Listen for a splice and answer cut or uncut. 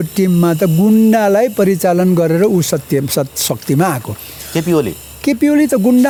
uncut